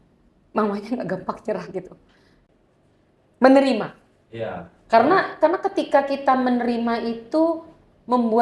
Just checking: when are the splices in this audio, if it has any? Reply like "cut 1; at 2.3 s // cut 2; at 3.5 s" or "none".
cut 1; at 2.3 s